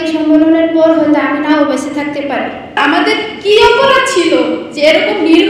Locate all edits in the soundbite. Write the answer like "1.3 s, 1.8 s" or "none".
2.8 s